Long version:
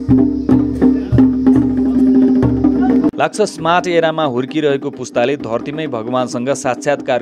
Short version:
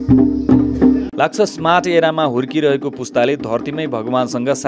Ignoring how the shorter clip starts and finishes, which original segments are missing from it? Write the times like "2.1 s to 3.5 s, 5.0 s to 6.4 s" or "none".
1.1 s to 3.1 s

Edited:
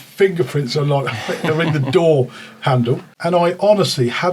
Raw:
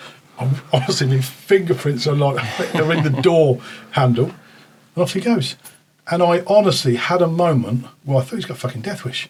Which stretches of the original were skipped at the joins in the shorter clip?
4.4 s to 6.0 s

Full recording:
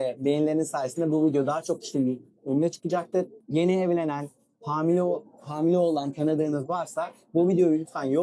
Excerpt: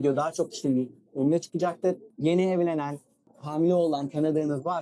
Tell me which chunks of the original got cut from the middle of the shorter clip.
4.6 s to 5.3 s

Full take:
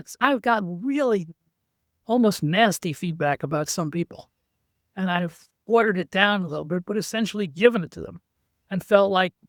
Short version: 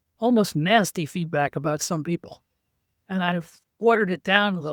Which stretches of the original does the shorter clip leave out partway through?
none

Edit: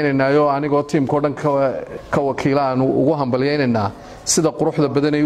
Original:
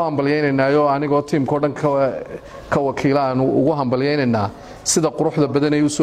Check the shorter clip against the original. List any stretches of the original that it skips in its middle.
2.3 s to 2.5 s

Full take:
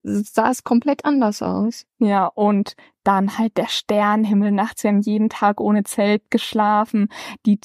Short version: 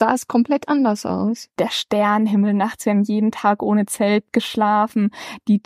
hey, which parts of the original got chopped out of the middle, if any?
1.9 s to 3.5 s

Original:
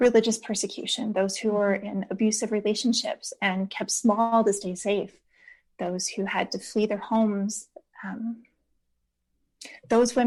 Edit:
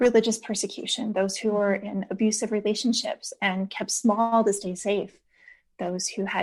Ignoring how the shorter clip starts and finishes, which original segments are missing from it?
none

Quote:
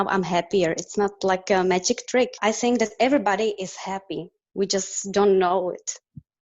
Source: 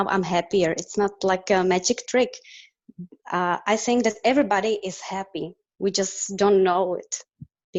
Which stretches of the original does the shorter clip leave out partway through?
2.4 s to 3.6 s

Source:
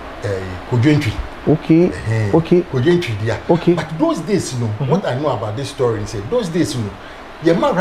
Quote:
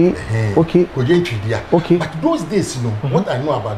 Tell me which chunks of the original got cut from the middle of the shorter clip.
none

